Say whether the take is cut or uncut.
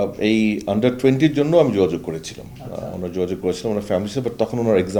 uncut